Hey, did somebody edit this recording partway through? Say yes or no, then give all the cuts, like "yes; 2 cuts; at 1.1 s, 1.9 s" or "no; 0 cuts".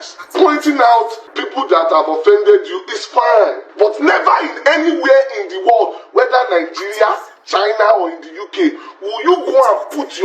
yes; 2 cuts; at 1.7 s, 3.6 s